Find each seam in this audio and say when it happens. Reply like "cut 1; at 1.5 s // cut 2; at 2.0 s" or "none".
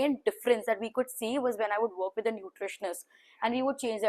none